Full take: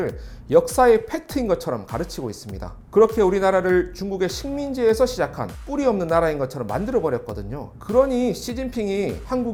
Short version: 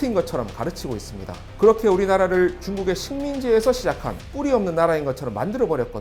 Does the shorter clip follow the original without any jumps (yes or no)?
yes